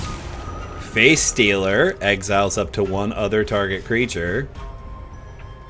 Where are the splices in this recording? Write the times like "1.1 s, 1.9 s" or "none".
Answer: none